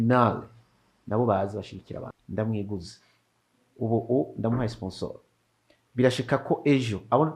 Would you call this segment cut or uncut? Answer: cut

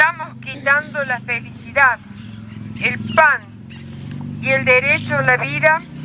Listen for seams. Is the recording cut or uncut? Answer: cut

